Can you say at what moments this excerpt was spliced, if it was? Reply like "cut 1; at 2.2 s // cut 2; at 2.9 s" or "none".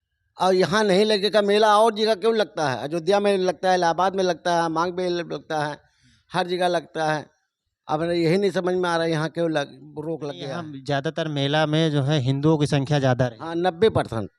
cut 1; at 10.3 s